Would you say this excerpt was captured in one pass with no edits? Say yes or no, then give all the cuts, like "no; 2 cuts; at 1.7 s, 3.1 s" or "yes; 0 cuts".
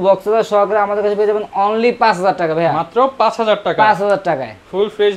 yes; 0 cuts